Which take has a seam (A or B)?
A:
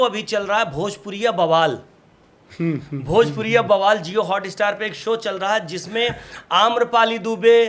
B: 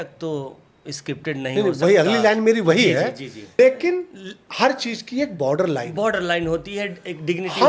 B